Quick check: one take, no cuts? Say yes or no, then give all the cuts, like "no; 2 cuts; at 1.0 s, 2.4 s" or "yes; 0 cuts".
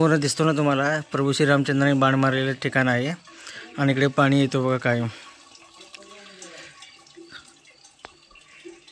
yes; 0 cuts